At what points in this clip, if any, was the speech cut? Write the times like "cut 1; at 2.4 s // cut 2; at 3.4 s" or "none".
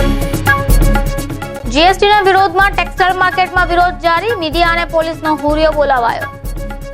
cut 1; at 1.2 s